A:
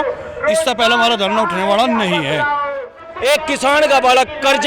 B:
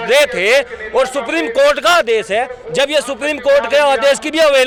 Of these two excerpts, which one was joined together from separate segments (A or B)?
A